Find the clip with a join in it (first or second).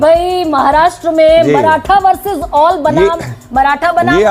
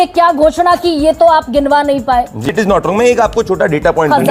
second